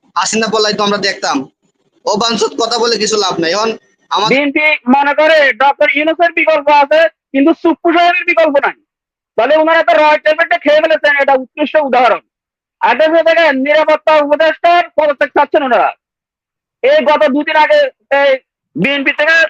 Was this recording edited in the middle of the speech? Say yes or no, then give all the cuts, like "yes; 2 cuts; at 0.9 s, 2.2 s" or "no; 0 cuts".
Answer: yes; 1 cut; at 4.3 s